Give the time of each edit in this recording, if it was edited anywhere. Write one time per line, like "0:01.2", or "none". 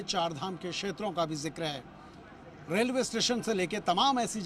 0:02.0